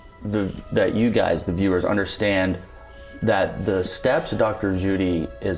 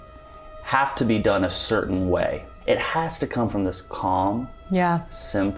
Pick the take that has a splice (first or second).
second